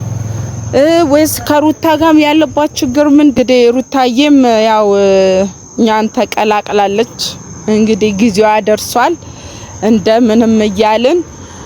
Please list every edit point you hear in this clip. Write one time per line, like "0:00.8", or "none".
0:03.4